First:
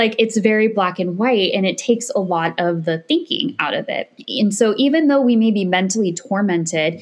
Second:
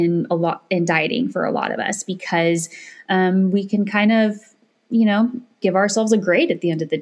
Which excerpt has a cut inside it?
first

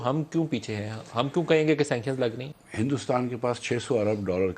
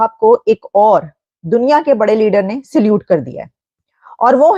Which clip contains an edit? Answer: first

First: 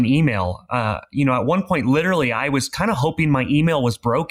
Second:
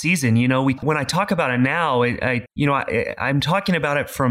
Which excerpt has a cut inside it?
second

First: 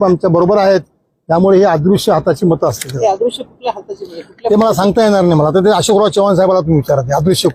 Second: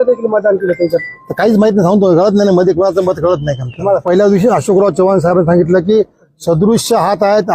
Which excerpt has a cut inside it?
second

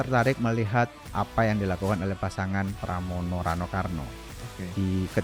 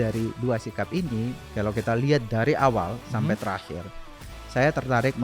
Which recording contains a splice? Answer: second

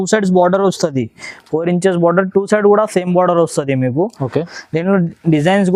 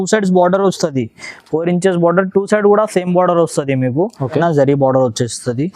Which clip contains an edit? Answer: second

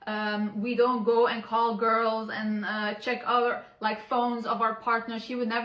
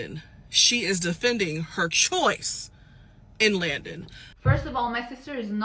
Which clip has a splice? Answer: second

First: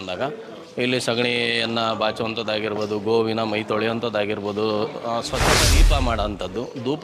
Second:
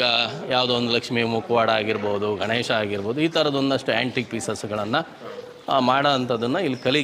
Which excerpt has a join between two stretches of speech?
first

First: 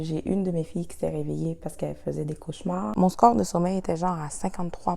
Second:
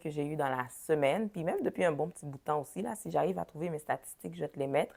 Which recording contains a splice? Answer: first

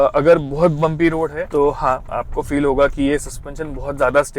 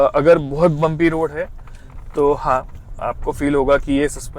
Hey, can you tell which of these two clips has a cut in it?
first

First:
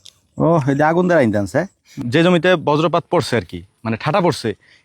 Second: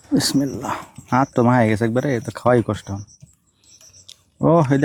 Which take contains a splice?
first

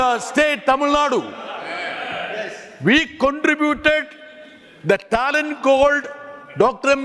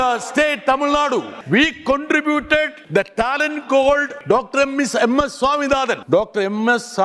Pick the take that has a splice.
second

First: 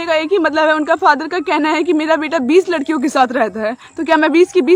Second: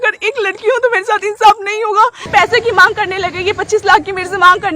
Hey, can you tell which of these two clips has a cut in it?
second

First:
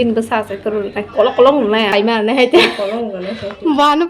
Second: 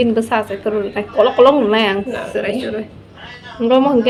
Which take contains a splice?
first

